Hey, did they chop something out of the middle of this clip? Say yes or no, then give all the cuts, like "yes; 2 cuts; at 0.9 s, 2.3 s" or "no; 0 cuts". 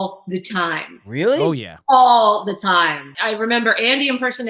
yes; 1 cut; at 3.1 s